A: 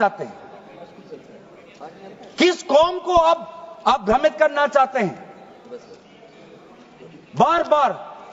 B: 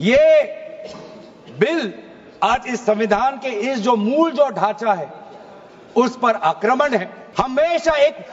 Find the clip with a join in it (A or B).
B